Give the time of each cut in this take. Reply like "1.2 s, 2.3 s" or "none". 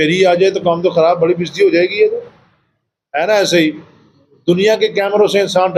none